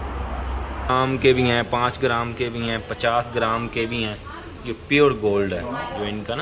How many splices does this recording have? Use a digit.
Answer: 1